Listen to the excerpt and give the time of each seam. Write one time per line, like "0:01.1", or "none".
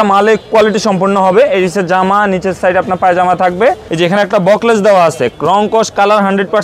0:03.9